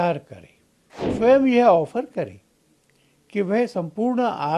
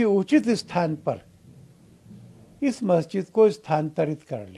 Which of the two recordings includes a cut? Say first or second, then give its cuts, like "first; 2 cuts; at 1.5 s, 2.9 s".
first; 1 cut; at 1.1 s